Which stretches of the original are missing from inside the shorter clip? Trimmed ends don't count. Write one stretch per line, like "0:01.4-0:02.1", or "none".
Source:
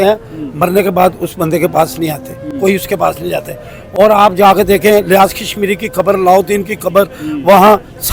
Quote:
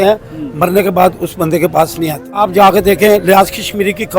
0:02.4-0:04.2